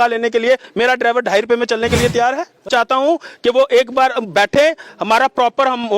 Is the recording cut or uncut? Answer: cut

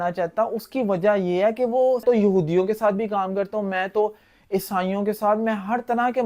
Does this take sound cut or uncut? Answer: cut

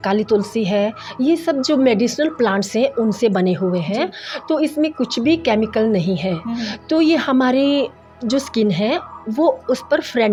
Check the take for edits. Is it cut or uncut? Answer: uncut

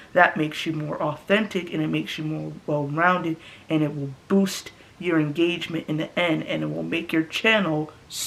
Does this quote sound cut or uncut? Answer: uncut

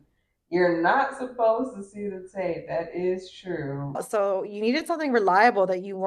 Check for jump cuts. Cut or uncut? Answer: cut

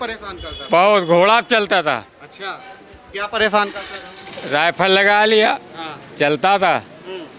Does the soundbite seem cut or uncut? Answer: uncut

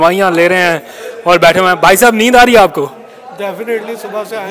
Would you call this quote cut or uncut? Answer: uncut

